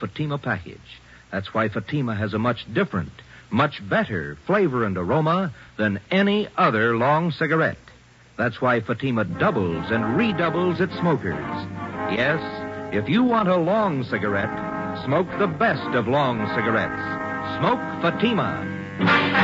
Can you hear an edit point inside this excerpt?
yes; 1 cut; at 1.6 s

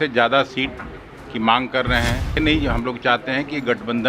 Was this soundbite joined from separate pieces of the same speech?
yes; 1 cut; at 2.4 s

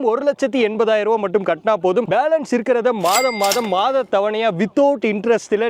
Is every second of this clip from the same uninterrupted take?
yes; 0 cuts

